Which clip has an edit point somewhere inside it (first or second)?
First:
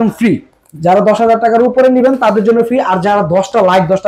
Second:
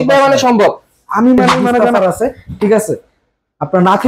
second